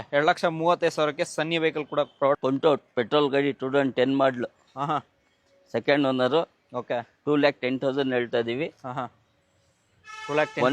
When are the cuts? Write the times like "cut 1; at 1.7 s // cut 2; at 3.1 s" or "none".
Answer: cut 1; at 2.4 s